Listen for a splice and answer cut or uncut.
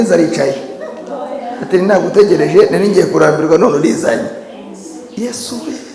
uncut